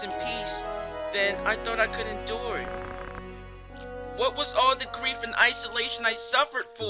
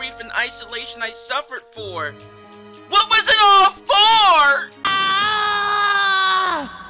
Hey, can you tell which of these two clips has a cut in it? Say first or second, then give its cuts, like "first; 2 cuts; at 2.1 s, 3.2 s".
second; 1 cut; at 4.7 s